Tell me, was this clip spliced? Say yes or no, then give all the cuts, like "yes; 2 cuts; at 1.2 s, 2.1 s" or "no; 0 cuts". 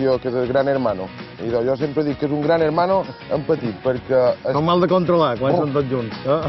no; 0 cuts